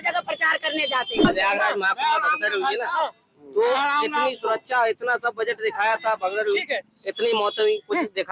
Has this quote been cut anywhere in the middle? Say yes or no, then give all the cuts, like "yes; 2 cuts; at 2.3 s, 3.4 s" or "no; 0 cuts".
yes; 1 cut; at 1.2 s